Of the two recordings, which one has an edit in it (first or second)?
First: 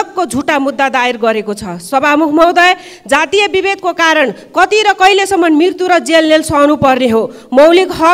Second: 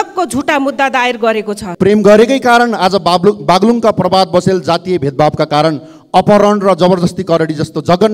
second